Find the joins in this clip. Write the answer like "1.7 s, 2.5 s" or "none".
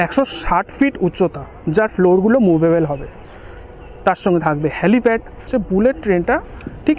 5.5 s

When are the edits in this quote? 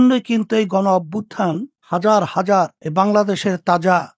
none

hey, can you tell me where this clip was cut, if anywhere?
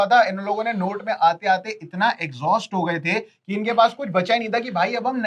none

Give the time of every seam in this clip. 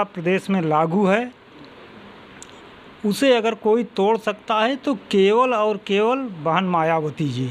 none

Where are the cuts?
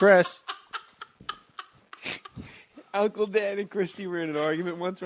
none

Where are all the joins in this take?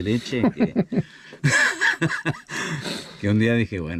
none

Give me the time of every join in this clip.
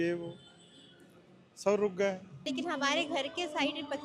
2.5 s

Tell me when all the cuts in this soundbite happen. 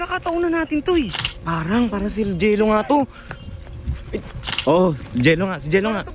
1.2 s, 4.4 s

